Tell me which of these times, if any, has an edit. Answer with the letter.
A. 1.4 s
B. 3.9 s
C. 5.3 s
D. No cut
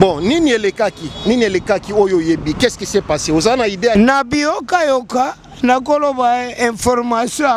B